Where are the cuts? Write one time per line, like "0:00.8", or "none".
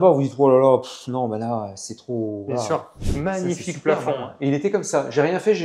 0:02.9